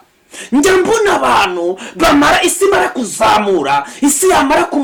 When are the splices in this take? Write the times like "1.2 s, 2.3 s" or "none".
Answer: none